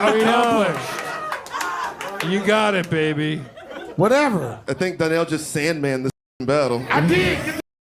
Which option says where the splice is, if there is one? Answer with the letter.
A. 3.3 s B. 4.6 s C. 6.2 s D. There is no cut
B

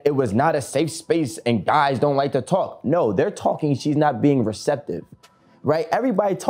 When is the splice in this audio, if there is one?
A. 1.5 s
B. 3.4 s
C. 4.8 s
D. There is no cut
D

